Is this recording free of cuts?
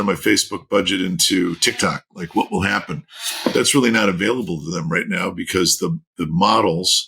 yes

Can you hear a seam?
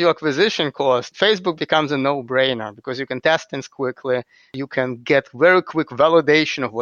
yes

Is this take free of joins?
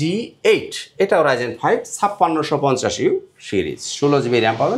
yes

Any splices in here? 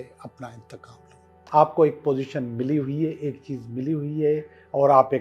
yes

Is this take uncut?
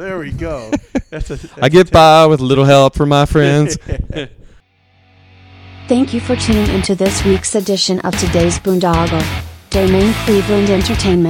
no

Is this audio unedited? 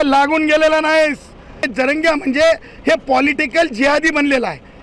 no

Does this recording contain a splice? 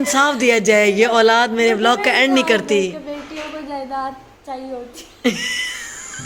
no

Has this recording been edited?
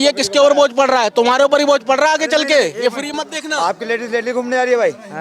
no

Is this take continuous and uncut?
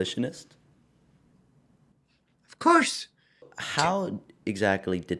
no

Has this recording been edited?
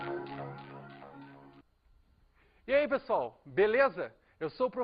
no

